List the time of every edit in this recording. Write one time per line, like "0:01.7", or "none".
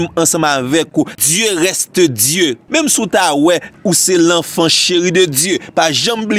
0:00.9
0:02.6
0:03.7